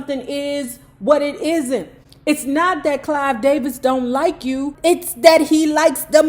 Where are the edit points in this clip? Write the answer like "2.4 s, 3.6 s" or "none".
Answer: 4.7 s